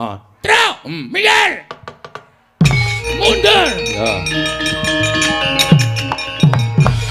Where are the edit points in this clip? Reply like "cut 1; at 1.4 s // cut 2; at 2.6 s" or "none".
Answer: cut 1; at 3.0 s